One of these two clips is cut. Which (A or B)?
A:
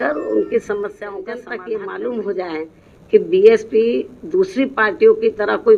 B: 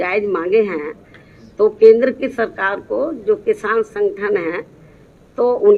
A